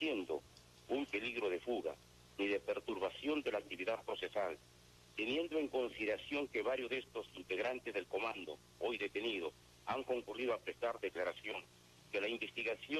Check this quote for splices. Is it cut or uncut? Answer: cut